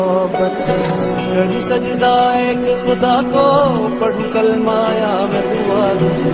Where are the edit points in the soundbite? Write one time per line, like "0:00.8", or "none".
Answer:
none